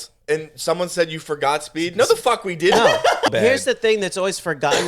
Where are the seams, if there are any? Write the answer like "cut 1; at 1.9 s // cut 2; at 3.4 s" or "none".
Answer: cut 1; at 3.3 s